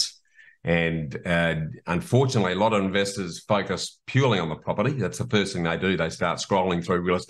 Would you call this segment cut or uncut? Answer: uncut